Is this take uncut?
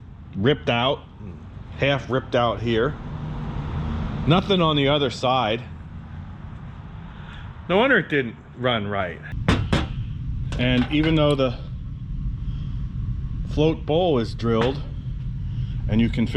no; 1 cut; at 9.3 s

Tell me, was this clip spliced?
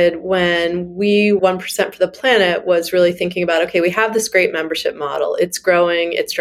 yes; 1 cut; at 1.4 s

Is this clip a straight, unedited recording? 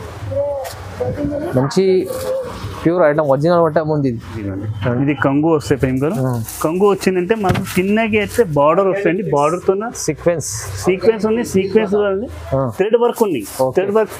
no; 1 cut; at 4.5 s

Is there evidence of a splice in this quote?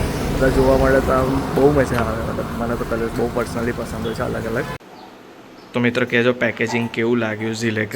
yes; 1 cut; at 4.8 s

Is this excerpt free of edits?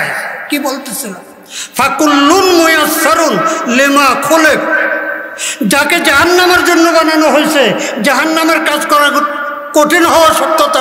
yes; 0 cuts

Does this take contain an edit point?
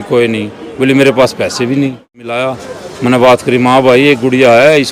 yes; 1 cut; at 2.4 s

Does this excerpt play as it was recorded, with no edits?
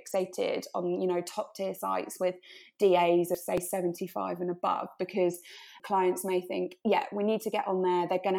yes; 0 cuts

